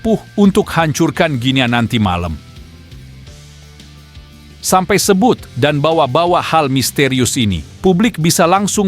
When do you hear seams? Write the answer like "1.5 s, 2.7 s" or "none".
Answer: 2.4 s, 4.7 s